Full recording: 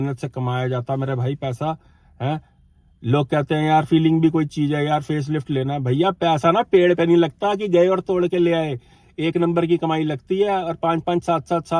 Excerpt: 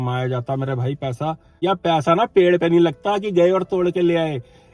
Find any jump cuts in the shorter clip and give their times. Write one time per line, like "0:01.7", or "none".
0:01.6